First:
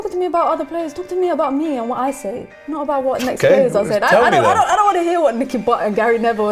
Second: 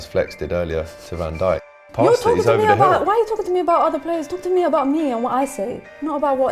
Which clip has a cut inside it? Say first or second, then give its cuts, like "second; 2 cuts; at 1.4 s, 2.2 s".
second; 1 cut; at 1.8 s